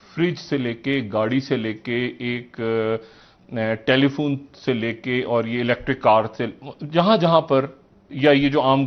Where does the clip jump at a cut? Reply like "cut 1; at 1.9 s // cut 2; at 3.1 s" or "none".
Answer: none